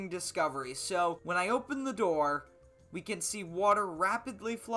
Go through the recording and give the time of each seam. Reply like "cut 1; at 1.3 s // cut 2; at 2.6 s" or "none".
cut 1; at 1.2 s